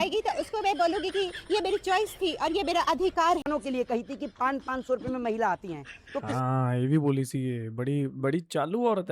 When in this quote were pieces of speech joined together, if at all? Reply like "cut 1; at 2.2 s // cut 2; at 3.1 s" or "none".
cut 1; at 3.4 s